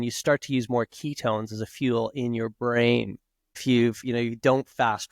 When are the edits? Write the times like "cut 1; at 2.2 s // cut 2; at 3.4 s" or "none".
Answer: cut 1; at 3.6 s